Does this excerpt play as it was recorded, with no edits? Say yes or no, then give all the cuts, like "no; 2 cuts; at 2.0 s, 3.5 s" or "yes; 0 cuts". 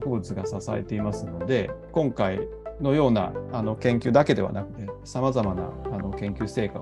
yes; 0 cuts